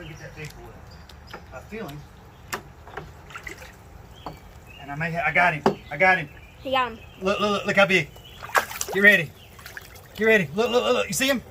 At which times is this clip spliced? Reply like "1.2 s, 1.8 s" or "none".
none